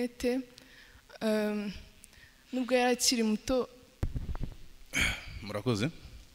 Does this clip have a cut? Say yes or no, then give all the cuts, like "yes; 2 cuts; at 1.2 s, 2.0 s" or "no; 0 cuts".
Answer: yes; 1 cut; at 3.8 s